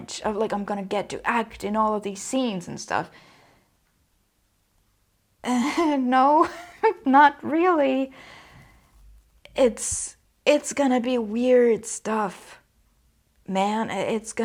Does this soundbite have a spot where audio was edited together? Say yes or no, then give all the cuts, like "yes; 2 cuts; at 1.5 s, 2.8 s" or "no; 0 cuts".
no; 0 cuts